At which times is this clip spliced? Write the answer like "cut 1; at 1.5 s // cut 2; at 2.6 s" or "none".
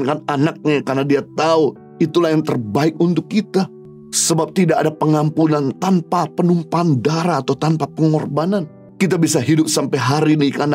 none